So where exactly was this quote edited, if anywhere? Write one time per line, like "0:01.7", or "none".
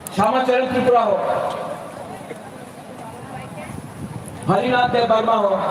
0:02.3
0:03.7
0:04.6